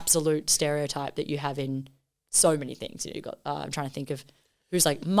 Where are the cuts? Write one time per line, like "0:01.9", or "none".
none

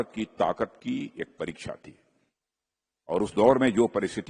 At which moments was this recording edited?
none

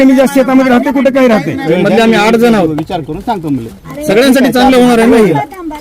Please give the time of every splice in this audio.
0:01.6

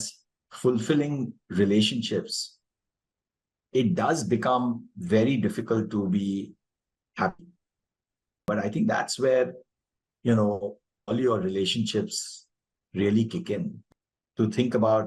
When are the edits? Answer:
0:08.5
0:13.8

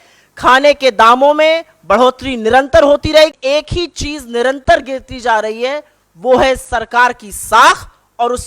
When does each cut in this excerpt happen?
0:03.3

